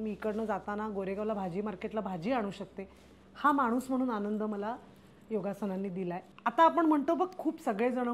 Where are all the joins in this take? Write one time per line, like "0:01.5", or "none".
0:06.2